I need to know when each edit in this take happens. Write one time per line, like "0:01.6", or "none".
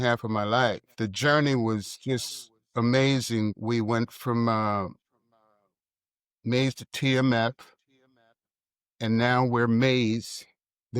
0:00.9
0:03.6